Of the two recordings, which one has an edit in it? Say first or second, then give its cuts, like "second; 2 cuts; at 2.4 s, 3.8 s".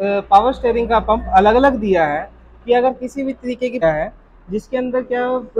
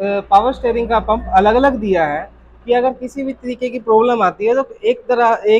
first; 1 cut; at 3.8 s